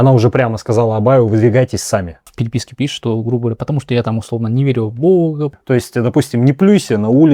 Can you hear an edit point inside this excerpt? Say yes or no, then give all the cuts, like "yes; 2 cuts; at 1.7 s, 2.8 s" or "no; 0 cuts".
yes; 2 cuts; at 2.3 s, 5.6 s